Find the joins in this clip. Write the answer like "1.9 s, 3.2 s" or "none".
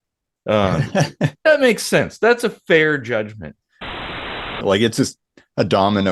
3.9 s